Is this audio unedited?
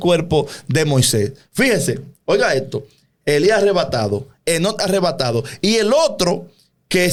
yes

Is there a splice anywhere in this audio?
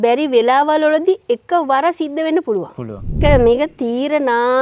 yes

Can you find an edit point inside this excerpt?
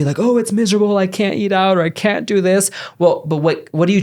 no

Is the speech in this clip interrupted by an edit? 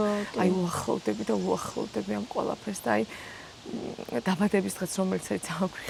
no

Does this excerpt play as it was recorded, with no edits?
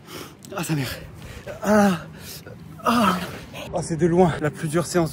no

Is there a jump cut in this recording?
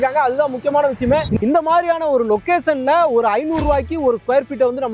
yes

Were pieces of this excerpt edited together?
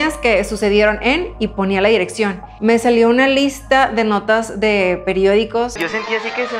yes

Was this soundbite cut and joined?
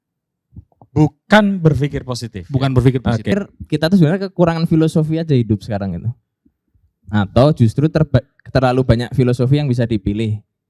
yes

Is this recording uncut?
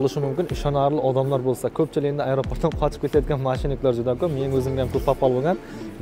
yes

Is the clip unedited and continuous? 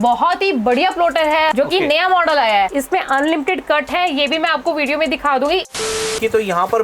no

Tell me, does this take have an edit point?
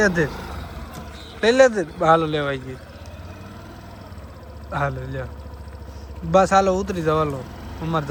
no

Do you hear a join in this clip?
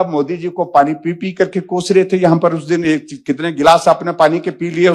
no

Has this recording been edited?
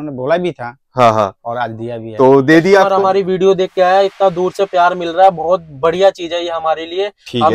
yes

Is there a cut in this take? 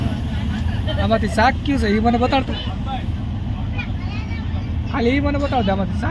no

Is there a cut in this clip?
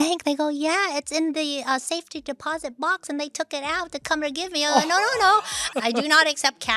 yes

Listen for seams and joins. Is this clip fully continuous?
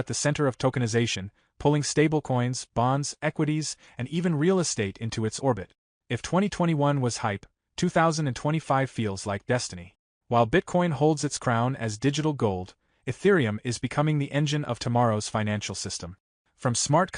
yes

